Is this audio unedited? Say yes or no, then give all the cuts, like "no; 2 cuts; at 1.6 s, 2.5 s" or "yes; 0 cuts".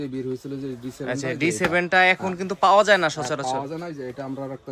yes; 0 cuts